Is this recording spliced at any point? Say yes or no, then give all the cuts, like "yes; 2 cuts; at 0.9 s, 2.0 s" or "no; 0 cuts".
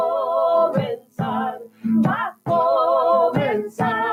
no; 0 cuts